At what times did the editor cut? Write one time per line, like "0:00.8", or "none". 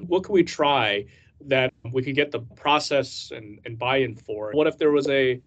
0:02.5
0:04.5